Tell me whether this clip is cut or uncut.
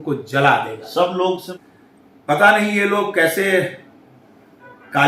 cut